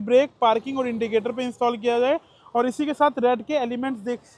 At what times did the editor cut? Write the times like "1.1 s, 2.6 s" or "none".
none